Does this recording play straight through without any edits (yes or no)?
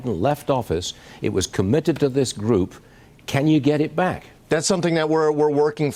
no